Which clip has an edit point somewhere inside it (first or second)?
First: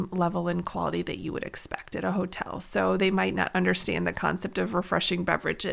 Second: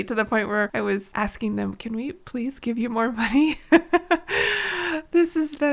second